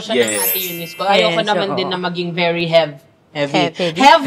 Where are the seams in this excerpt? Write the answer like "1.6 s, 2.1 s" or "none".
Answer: none